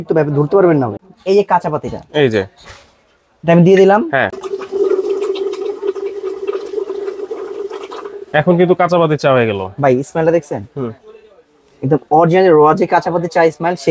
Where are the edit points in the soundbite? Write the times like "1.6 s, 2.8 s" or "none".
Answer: 0.9 s, 4.4 s